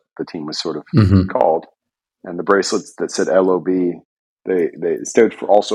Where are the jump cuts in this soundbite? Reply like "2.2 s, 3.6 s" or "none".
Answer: none